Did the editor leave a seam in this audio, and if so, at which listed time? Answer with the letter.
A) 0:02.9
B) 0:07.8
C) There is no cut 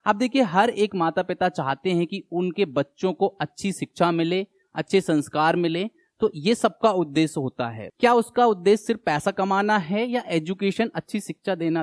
B